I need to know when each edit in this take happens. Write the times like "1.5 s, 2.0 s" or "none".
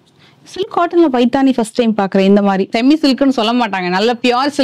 2.7 s